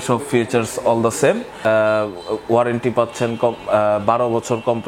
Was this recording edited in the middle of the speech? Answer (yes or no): yes